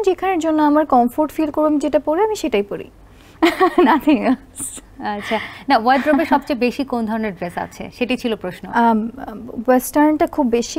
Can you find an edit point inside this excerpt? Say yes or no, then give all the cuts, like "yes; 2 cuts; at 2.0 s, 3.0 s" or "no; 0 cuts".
no; 0 cuts